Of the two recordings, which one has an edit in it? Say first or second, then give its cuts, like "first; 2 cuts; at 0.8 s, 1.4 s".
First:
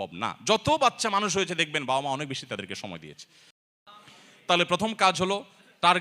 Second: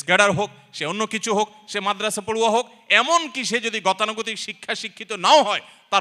first; 1 cut; at 3.6 s